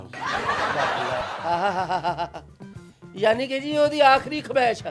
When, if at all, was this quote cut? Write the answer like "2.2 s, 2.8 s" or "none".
none